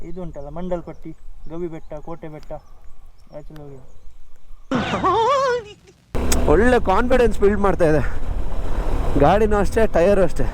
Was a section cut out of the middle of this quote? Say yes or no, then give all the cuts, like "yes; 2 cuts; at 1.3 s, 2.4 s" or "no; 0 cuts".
yes; 2 cuts; at 4.5 s, 6.1 s